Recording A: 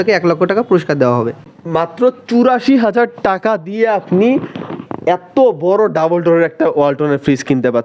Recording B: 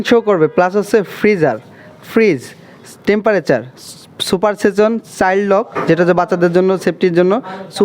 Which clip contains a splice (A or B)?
A